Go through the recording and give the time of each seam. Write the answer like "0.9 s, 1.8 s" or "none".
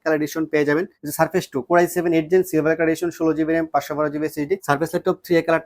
1.0 s, 4.6 s